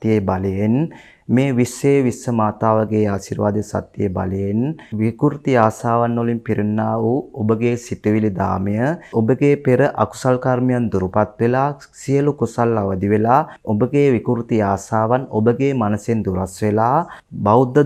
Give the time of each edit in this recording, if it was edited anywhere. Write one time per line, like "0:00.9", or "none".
none